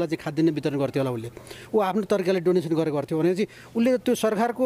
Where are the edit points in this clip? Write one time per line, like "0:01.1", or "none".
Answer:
none